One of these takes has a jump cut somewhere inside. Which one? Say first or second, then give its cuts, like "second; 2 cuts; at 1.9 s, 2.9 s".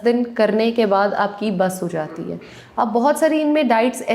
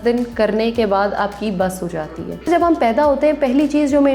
second; 1 cut; at 2.5 s